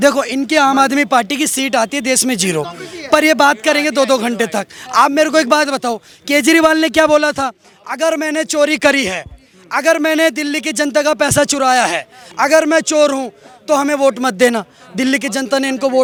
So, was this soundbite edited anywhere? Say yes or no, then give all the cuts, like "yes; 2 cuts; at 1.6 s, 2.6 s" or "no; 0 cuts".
no; 0 cuts